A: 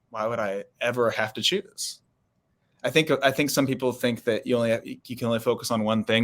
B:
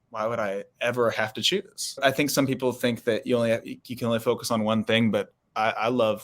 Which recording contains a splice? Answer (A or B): B